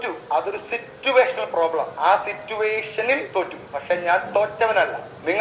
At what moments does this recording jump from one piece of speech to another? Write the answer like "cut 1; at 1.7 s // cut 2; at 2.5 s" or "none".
none

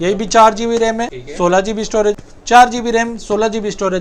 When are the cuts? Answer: cut 1; at 1.2 s // cut 2; at 2.1 s

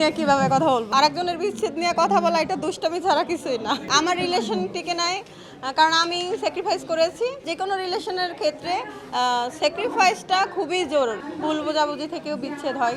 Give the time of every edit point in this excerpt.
cut 1; at 0.9 s // cut 2; at 3.8 s // cut 3; at 7.5 s // cut 4; at 11.3 s

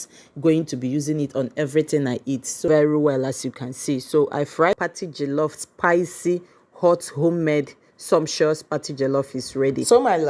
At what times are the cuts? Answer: cut 1; at 2.6 s // cut 2; at 4.7 s

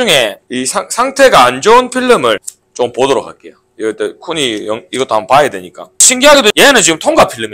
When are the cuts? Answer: cut 1; at 6.1 s

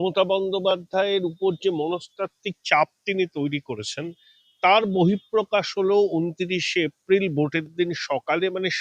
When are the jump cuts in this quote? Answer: none

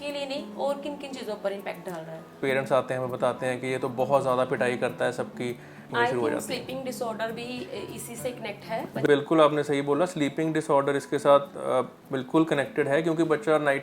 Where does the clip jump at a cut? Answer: cut 1; at 2.4 s // cut 2; at 5.8 s // cut 3; at 9.1 s

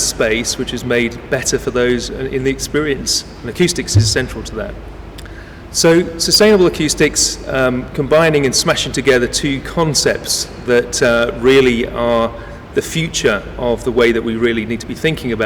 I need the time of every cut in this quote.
none

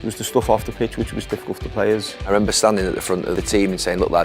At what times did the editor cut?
cut 1; at 2.3 s // cut 2; at 3.3 s

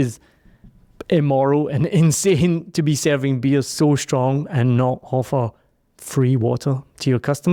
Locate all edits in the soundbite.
none

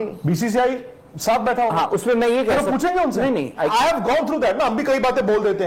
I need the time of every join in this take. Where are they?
cut 1; at 3.7 s

